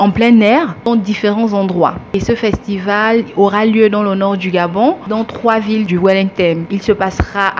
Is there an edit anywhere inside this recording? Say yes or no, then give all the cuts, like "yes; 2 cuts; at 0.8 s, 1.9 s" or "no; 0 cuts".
yes; 2 cuts; at 5.0 s, 6.7 s